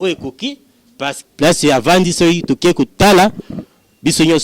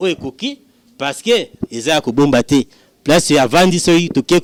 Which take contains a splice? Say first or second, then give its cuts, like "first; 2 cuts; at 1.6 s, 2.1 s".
first; 1 cut; at 1.1 s